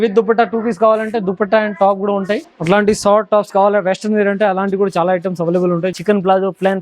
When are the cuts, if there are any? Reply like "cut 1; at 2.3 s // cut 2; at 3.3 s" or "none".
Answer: cut 1; at 2.5 s // cut 2; at 5.9 s